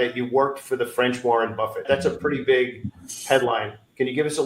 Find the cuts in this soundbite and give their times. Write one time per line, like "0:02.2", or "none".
0:01.8